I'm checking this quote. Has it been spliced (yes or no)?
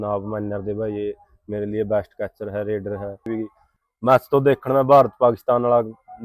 yes